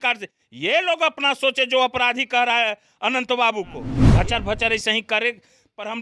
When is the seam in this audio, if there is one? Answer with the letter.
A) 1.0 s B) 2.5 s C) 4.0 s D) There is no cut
C